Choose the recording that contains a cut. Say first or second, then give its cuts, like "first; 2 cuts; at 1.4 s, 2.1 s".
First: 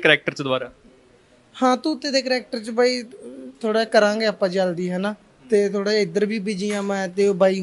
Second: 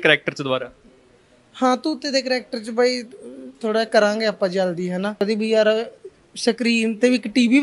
second; 1 cut; at 5.2 s